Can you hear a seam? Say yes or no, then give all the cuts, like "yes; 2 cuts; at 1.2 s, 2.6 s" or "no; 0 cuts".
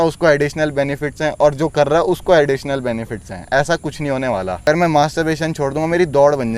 yes; 1 cut; at 4.7 s